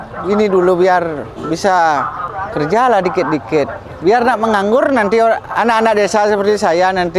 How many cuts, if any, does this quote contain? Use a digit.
1